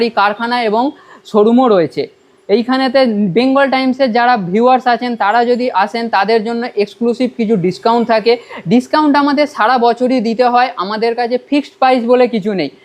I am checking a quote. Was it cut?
no; 0 cuts

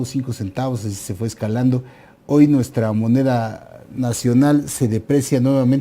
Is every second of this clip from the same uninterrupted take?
no; 1 cut; at 1.1 s

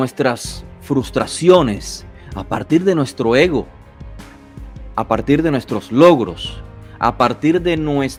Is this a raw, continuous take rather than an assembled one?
yes; 0 cuts

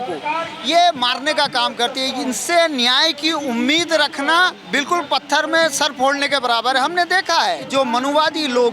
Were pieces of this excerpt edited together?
yes; 2 cuts; at 4.6 s, 7.6 s

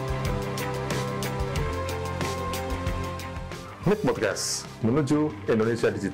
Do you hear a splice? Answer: no; 0 cuts

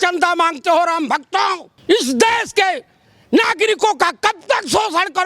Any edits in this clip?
yes; 1 cut; at 1.7 s

